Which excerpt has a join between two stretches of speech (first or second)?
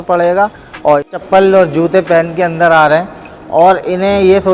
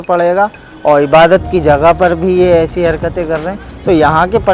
first